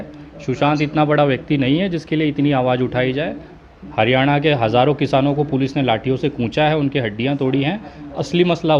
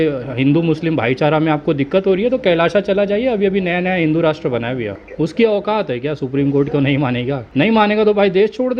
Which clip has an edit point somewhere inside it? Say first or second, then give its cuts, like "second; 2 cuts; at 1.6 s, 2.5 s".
second; 2 cuts; at 5.0 s, 7.4 s